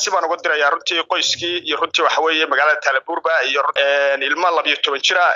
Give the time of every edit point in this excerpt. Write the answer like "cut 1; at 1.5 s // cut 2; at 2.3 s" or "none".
cut 1; at 3.7 s